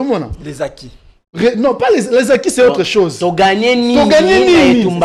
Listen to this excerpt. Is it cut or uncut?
uncut